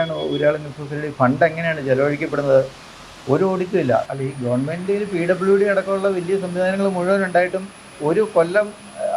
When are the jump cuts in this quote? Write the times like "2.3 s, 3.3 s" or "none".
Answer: 4.1 s